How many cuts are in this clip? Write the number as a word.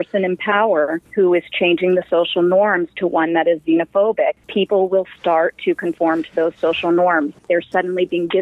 two